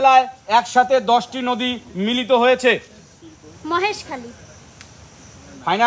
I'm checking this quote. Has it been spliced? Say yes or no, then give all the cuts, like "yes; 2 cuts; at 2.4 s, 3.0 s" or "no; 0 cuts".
no; 0 cuts